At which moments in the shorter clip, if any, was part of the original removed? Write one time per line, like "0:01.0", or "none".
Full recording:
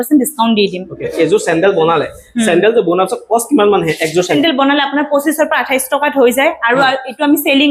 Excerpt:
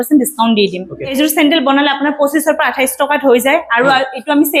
0:01.2